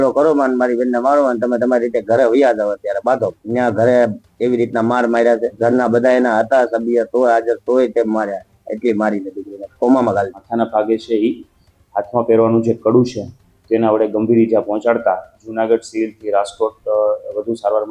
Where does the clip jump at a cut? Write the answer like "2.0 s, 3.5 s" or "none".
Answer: 3.4 s, 5.5 s, 10.4 s, 15.4 s